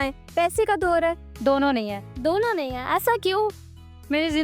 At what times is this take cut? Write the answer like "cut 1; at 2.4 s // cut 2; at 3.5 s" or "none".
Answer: cut 1; at 1.3 s